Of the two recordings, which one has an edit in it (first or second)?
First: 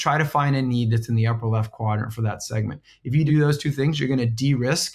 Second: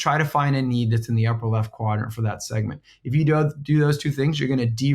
first